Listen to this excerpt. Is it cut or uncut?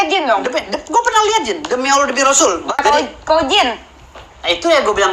cut